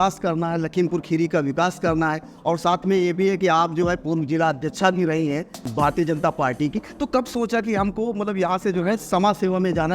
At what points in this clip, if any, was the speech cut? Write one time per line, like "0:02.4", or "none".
0:05.6